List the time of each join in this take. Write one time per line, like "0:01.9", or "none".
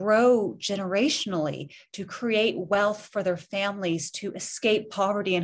none